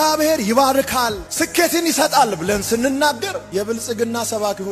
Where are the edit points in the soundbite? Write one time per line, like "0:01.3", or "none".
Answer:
none